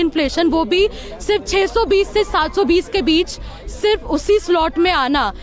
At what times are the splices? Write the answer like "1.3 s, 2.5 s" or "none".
none